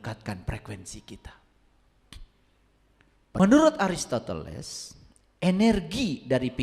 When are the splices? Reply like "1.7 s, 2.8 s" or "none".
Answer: 3.4 s